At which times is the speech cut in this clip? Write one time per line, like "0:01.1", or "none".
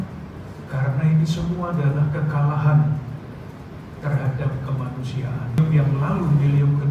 0:05.6